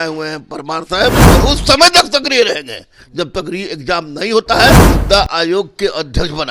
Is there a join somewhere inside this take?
yes; 2 cuts; at 1.2 s, 4.9 s

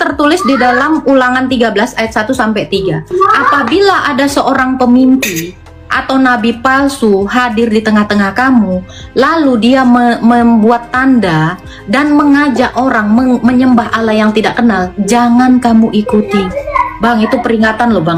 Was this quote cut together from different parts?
no; 0 cuts

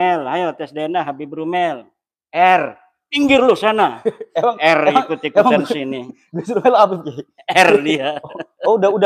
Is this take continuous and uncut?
yes; 0 cuts

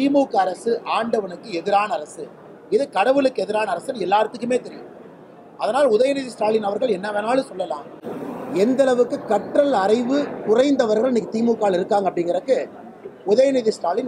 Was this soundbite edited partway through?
yes; 1 cut; at 7.9 s

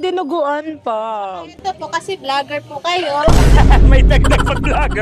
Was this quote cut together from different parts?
no; 0 cuts

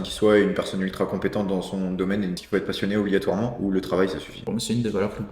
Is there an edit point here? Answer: yes; 2 cuts; at 2.4 s, 4.3 s

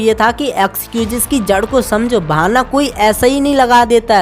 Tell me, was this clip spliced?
no; 0 cuts

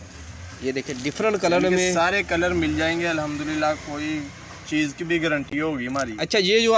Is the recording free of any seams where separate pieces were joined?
yes; 0 cuts

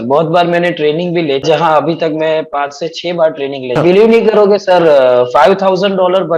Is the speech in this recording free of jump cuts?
no; 2 cuts; at 1.4 s, 3.8 s

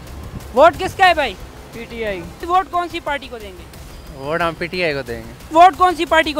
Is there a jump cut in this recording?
yes; 2 cuts; at 2.3 s, 5.4 s

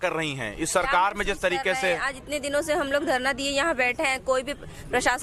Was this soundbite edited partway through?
no; 0 cuts

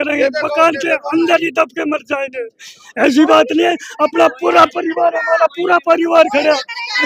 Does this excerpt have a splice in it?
no; 0 cuts

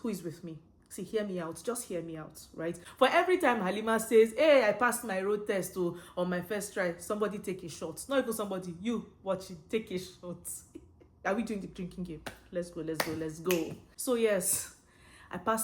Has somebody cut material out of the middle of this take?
no; 0 cuts

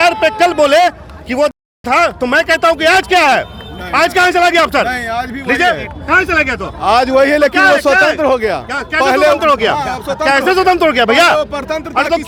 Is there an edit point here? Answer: no; 0 cuts

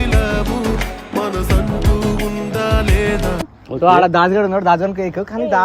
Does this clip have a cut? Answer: yes; 1 cut; at 3.5 s

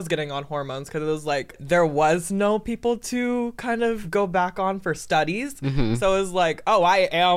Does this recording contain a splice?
yes; 2 cuts; at 1.6 s, 4.0 s

